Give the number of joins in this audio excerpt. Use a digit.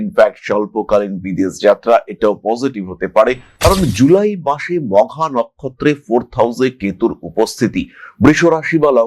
1